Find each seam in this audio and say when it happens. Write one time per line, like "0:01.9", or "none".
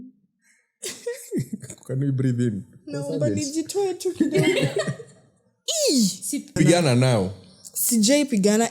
0:06.6